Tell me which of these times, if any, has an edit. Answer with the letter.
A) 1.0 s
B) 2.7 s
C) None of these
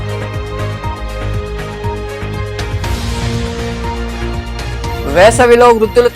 B